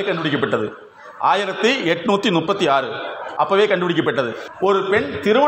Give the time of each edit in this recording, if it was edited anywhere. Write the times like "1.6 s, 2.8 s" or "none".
4.4 s